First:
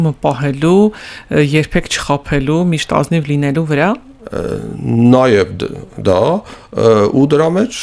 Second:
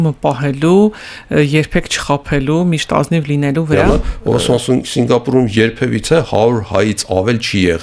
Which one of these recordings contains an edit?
second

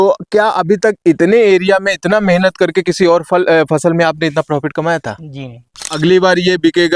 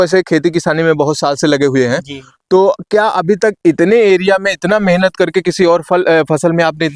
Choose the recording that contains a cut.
first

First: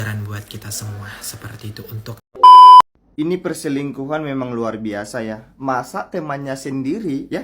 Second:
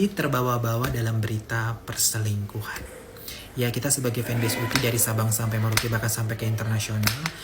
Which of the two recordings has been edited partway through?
first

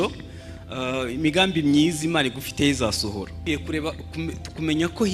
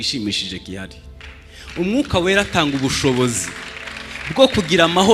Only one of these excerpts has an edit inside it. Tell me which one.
first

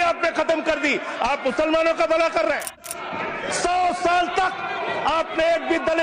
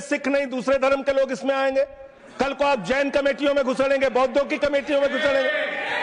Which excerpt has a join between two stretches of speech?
first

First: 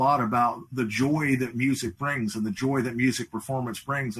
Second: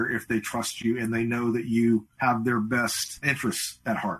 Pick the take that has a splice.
second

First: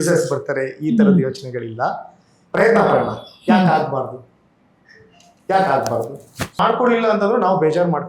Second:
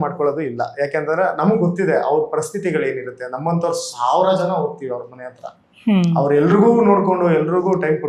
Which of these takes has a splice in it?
first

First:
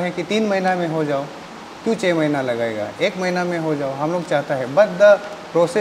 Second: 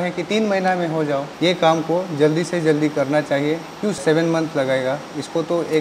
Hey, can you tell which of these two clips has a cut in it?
second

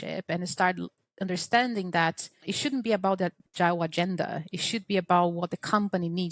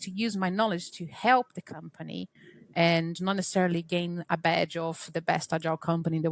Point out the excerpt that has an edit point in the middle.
first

